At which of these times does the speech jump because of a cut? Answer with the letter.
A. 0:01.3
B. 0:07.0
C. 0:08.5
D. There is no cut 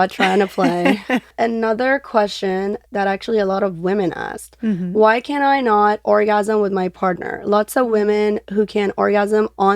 A